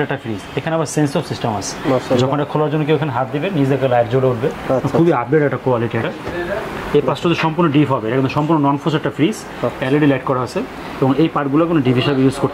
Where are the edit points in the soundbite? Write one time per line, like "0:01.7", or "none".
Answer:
none